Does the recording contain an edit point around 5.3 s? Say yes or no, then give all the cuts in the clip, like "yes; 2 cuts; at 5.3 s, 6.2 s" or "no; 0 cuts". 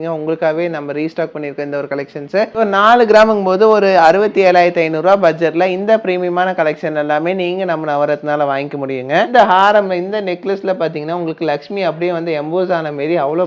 no; 2 cuts; at 2.6 s, 9.3 s